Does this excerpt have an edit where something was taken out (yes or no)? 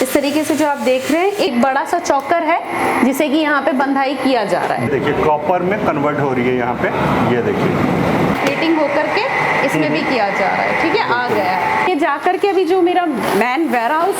yes